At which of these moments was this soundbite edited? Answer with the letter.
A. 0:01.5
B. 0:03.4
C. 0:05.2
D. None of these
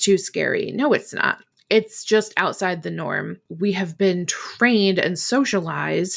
B